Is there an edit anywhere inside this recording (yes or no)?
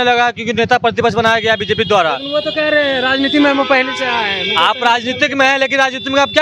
no